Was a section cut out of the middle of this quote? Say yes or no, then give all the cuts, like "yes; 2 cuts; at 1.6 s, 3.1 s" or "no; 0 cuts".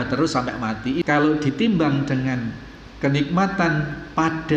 yes; 1 cut; at 1.0 s